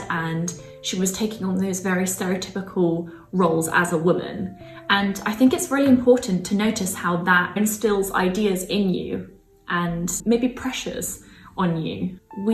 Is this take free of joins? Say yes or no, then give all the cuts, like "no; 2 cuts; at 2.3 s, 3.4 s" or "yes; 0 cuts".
yes; 0 cuts